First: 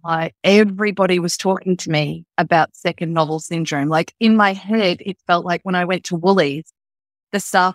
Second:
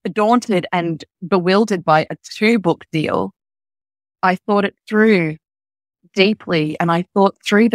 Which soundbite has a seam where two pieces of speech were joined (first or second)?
second